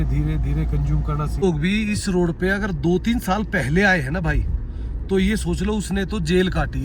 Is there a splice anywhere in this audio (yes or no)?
yes